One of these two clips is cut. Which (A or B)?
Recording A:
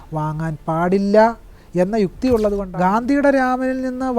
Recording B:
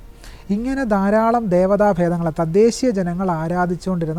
A